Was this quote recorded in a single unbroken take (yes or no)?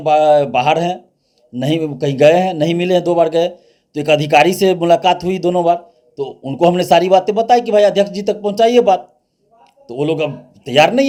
yes